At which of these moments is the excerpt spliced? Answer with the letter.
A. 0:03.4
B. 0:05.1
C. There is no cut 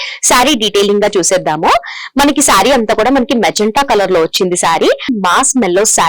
B